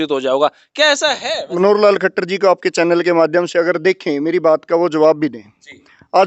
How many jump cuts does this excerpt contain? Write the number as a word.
one